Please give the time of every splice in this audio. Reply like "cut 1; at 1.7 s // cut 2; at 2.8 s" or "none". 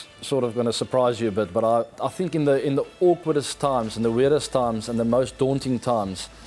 cut 1; at 1.9 s